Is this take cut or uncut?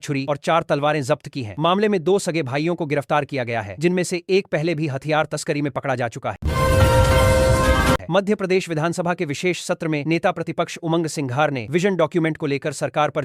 cut